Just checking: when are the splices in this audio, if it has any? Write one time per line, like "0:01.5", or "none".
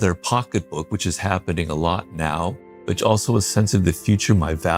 none